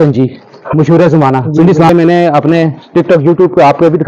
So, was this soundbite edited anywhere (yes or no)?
yes